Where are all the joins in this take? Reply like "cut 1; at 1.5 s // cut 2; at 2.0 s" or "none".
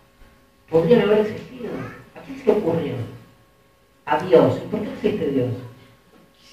cut 1; at 4.6 s